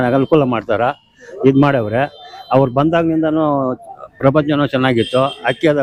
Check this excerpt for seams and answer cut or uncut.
uncut